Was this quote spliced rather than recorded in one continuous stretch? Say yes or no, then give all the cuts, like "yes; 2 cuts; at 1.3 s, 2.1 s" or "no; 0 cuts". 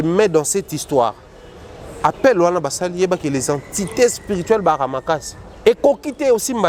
yes; 1 cut; at 5.6 s